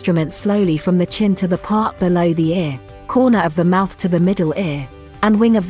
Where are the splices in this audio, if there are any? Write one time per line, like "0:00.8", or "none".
none